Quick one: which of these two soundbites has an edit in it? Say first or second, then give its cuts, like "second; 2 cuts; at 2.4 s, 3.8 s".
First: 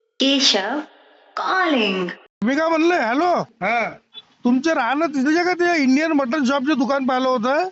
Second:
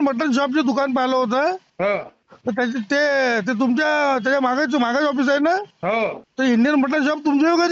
first; 1 cut; at 2.4 s